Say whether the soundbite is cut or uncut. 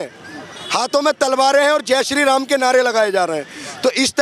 uncut